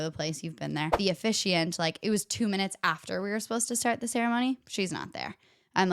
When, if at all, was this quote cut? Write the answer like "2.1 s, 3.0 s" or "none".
0.9 s